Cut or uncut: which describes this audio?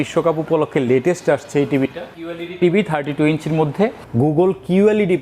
cut